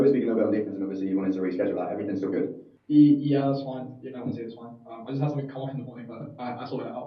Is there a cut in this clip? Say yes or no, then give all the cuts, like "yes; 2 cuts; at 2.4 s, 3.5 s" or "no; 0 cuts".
yes; 1 cut; at 2.7 s